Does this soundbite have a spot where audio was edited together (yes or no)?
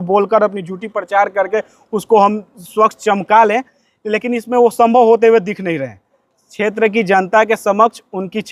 no